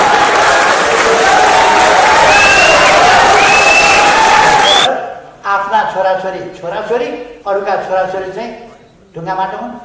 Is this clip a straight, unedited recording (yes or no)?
no